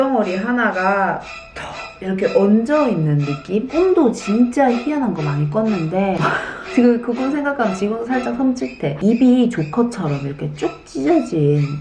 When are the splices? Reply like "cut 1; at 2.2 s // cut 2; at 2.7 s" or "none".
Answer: none